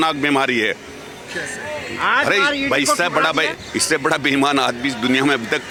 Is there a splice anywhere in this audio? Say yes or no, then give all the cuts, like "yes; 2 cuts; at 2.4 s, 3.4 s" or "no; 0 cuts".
no; 0 cuts